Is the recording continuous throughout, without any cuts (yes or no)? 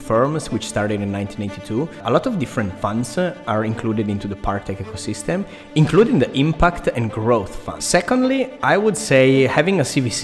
no